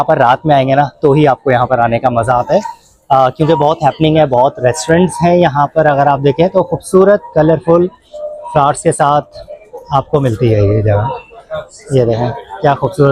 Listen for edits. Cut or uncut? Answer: uncut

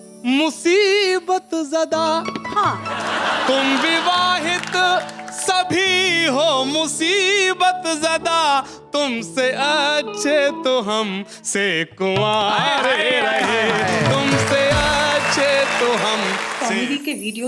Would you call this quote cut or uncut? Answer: cut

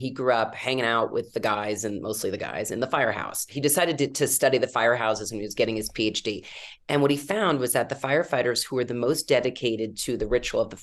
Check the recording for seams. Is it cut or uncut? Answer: cut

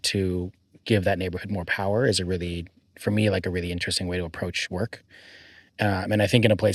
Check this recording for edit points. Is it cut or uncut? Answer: uncut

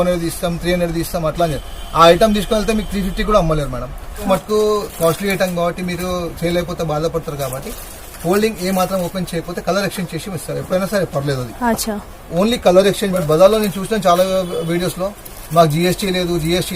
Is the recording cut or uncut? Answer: cut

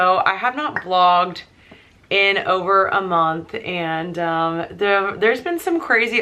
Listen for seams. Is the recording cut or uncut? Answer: uncut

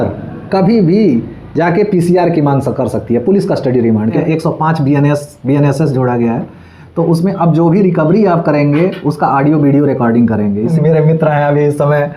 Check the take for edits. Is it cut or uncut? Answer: cut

